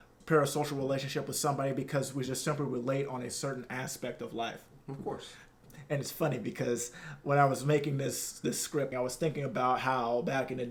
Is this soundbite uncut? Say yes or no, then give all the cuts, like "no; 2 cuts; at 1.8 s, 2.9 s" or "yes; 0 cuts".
yes; 0 cuts